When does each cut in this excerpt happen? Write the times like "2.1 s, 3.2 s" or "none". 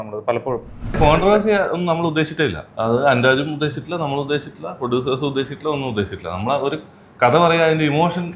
1.0 s, 2.6 s